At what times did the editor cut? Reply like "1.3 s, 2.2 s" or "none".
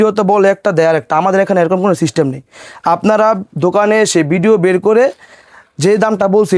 none